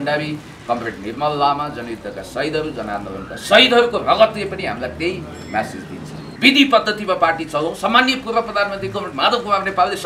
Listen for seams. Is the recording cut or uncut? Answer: cut